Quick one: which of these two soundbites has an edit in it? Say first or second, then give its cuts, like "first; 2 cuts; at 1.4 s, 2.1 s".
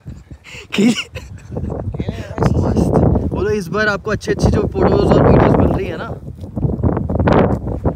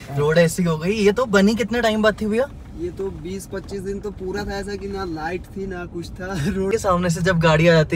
second; 1 cut; at 6.7 s